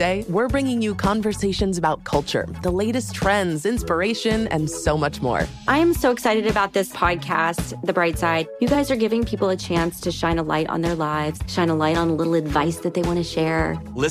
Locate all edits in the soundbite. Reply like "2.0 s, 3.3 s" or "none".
none